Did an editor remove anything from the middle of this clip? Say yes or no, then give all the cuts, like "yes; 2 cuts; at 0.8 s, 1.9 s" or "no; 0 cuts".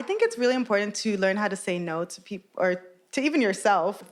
no; 0 cuts